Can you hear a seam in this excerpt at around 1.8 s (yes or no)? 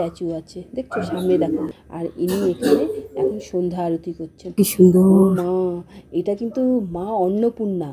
yes